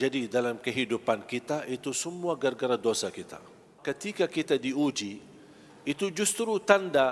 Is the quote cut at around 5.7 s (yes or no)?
no